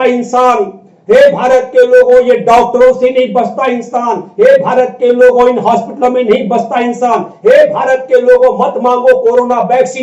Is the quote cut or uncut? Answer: uncut